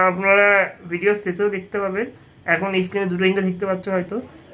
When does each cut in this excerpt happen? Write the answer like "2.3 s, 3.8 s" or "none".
none